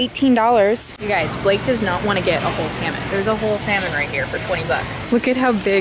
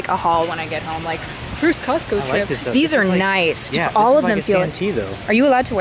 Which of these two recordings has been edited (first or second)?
first